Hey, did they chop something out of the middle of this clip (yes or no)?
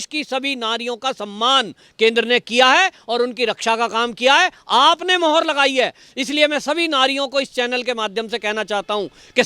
no